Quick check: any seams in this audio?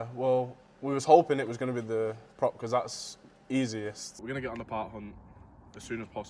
yes; 1 cut; at 4.2 s

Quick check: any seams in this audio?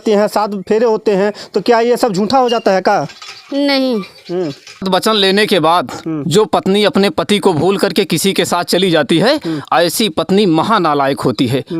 yes; 1 cut; at 4.9 s

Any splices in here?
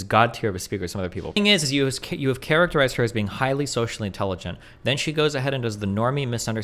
yes; 1 cut; at 1.4 s

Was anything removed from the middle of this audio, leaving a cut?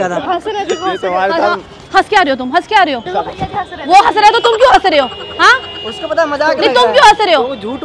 yes; 1 cut; at 3.1 s

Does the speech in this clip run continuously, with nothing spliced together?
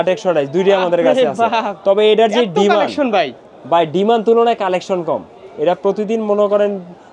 yes; 0 cuts

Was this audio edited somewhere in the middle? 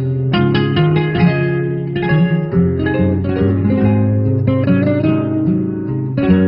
yes; 1 cut; at 4.1 s

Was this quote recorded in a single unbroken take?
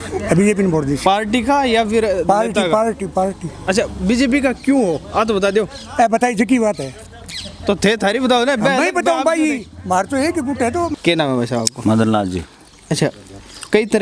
no; 1 cut; at 11.0 s

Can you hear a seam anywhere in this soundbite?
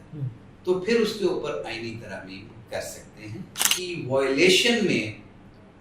yes; 1 cut; at 3.6 s

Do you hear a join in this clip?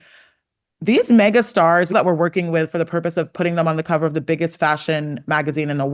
yes; 1 cut; at 1.9 s

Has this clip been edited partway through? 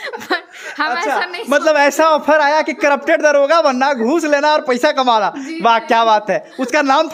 no; 0 cuts

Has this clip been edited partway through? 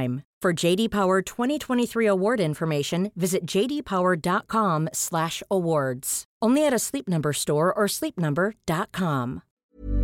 no; 0 cuts

